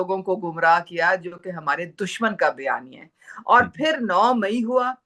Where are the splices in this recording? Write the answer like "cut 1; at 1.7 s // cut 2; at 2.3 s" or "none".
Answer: none

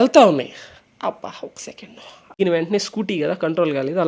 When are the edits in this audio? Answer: cut 1; at 2.3 s

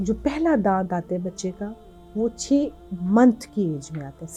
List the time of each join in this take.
none

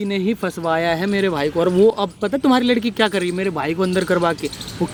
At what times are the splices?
none

